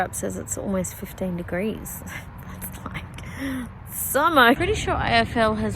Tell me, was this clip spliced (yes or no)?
yes